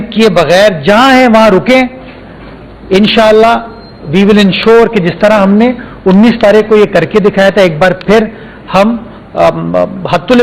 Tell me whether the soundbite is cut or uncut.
uncut